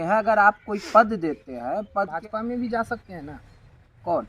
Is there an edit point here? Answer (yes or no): yes